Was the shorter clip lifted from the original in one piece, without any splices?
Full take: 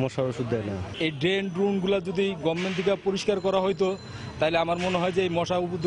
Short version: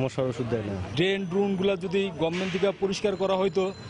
no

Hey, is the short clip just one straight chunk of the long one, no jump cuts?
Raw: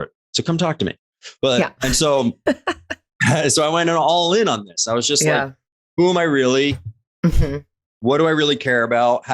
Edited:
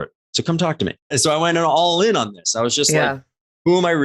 no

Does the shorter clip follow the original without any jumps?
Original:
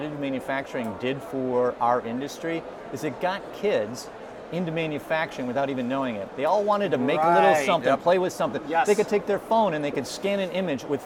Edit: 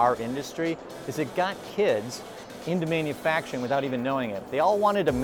yes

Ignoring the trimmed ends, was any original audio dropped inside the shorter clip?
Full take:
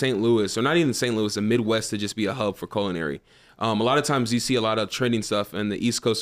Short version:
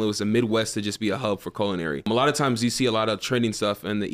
yes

